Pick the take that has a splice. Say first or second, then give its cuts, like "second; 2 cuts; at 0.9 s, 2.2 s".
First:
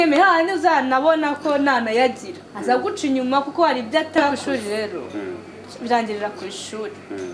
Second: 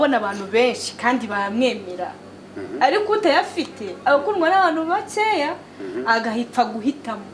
first; 1 cut; at 4.4 s